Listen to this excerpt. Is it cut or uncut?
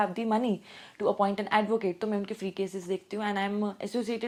uncut